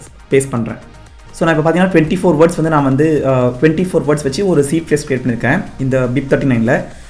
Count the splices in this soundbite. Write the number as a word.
one